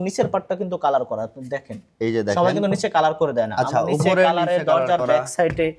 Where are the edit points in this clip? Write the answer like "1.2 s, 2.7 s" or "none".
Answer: none

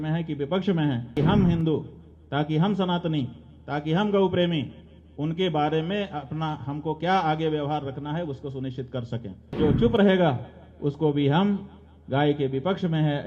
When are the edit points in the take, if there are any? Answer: 1.1 s, 9.5 s

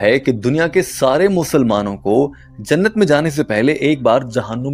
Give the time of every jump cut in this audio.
none

